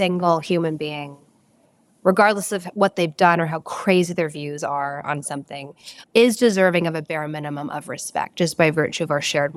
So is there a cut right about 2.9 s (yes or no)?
no